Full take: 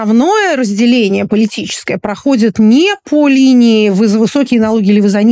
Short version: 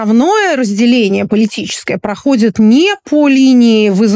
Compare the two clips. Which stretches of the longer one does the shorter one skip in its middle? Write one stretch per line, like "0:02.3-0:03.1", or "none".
none

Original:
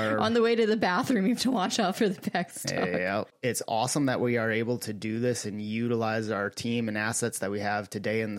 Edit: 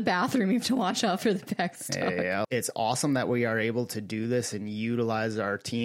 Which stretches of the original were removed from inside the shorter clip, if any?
0:03.2-0:03.4

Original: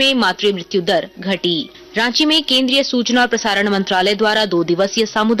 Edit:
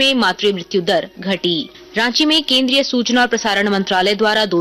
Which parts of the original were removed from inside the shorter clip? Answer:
none

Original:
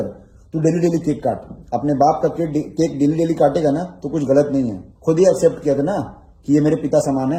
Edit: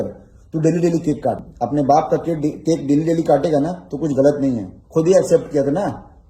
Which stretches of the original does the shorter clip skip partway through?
0:01.5-0:01.6

